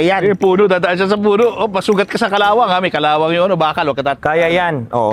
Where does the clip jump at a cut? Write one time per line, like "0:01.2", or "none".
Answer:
none

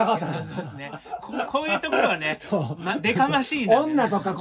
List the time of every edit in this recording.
none

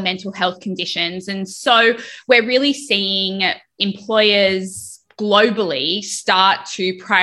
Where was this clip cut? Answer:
0:01.5
0:03.8

